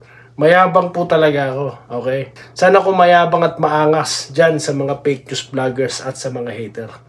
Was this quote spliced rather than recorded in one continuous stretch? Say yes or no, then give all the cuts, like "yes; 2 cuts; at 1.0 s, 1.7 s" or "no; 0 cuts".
no; 0 cuts